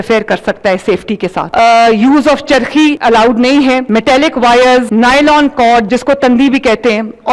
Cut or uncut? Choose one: cut